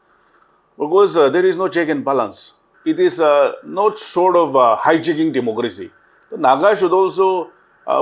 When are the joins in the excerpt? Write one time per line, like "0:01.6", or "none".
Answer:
0:02.7